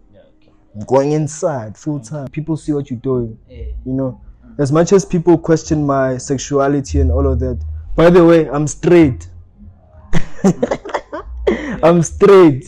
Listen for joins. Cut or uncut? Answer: cut